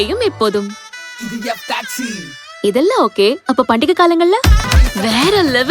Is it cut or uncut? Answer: cut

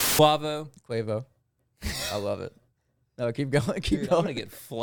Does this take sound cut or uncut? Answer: uncut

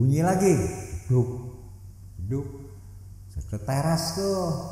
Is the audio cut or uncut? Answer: uncut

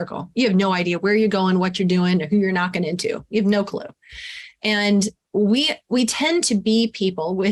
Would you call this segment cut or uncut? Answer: uncut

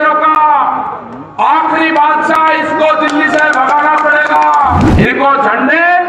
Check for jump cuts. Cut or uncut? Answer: cut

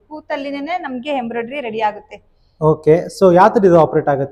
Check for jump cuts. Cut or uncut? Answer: uncut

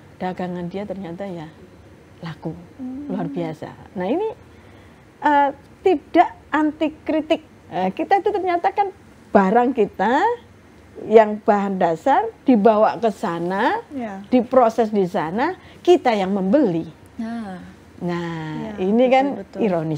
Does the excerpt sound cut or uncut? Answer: cut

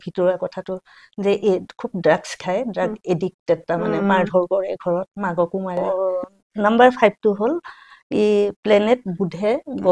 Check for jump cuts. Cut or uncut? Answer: cut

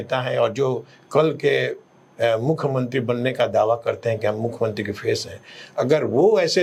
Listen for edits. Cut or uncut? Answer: uncut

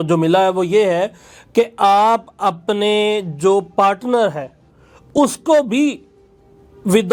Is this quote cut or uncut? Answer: uncut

